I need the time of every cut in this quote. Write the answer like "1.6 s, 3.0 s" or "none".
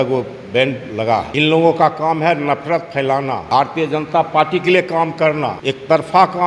1.3 s, 3.4 s, 5.6 s